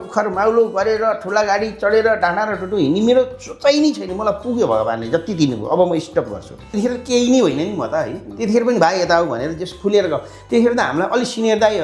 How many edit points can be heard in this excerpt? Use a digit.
1